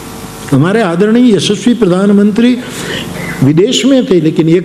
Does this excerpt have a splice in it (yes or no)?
no